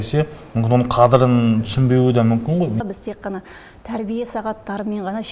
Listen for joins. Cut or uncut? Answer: cut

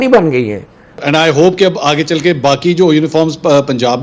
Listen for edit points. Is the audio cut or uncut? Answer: cut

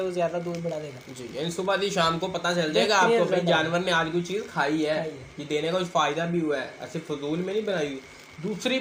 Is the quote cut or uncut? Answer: uncut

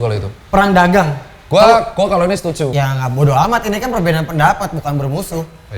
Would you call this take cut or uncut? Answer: cut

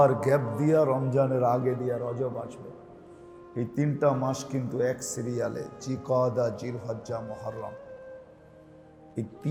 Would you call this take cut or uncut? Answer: uncut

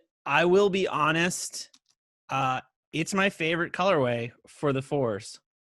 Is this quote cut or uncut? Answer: uncut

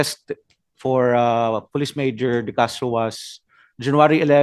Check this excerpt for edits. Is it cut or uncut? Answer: uncut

